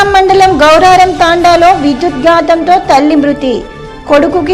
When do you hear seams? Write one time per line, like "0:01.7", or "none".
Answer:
none